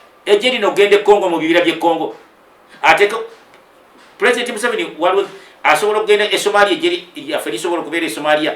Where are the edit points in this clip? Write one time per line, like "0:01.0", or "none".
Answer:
none